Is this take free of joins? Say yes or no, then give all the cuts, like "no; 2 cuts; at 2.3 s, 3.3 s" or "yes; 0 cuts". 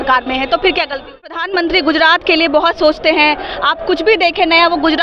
no; 1 cut; at 1.4 s